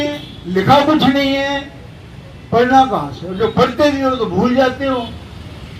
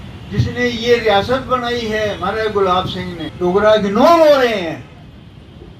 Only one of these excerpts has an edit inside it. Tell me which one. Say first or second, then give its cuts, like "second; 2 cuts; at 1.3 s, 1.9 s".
second; 1 cut; at 3.2 s